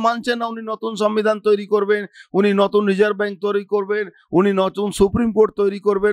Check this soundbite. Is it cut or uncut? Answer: uncut